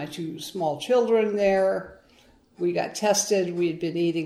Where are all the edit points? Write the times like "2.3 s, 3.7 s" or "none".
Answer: none